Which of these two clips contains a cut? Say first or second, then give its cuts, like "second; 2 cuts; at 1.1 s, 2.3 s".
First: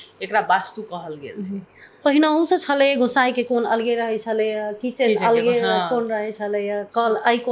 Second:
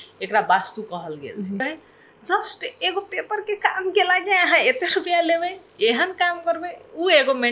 second; 1 cut; at 1.6 s